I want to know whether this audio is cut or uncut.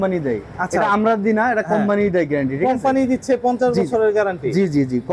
uncut